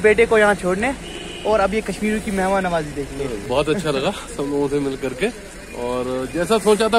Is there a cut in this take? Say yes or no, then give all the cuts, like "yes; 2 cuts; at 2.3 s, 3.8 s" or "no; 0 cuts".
yes; 1 cut; at 3.4 s